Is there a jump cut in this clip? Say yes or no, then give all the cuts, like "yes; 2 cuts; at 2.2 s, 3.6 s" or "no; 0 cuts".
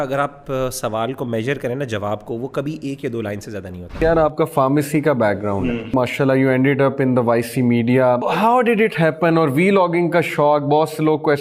yes; 3 cuts; at 4.0 s, 5.9 s, 8.3 s